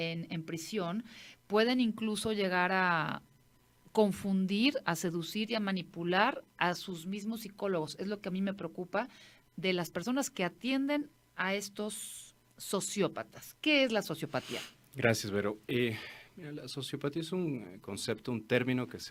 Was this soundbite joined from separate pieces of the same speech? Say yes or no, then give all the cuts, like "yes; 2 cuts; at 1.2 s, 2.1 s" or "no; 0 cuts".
no; 0 cuts